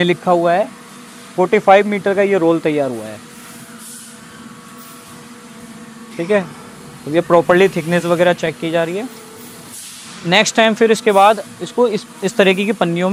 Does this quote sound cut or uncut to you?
uncut